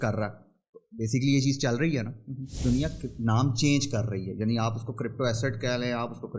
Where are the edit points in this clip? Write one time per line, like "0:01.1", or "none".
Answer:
0:02.6

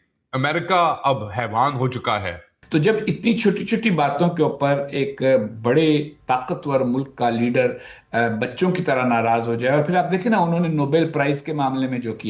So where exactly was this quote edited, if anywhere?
none

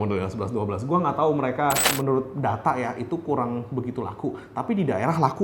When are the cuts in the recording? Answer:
0:01.9

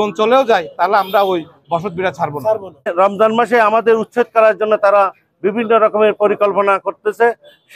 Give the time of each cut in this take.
0:02.9

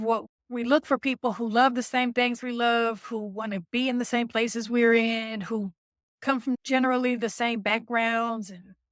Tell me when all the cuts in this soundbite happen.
none

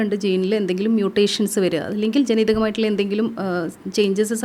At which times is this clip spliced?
none

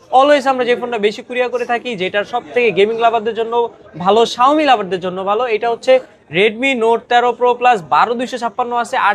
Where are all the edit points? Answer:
none

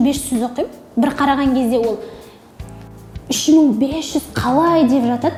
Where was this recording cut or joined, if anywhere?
none

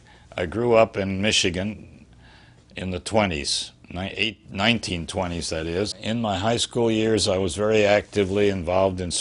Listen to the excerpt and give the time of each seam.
0:06.0

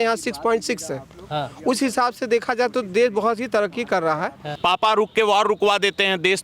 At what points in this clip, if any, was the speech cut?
0:04.4

